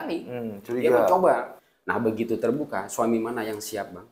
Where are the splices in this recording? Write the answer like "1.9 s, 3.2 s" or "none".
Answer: 1.6 s